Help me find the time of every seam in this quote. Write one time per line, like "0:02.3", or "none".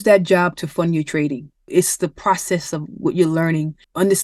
0:01.7